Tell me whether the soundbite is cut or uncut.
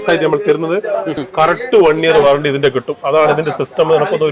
cut